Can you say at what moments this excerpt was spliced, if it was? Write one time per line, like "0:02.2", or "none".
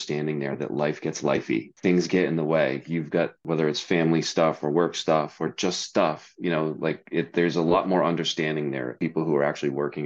0:01.7
0:03.4
0:09.0